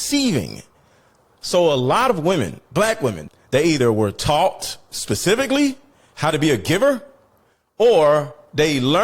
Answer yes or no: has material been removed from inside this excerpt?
yes